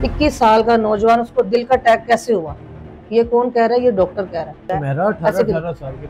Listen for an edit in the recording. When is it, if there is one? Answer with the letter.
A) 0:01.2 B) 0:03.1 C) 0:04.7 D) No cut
C